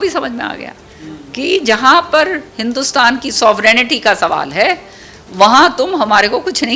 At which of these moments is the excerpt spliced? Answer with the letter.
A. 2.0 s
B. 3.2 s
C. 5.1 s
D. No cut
D